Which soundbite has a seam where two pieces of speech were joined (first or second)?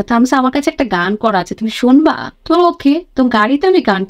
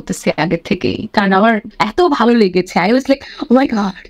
second